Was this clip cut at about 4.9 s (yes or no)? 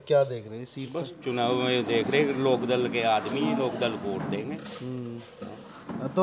no